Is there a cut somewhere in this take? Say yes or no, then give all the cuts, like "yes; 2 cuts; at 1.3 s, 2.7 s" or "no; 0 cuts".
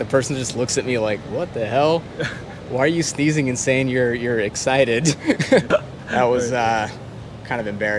yes; 1 cut; at 5.7 s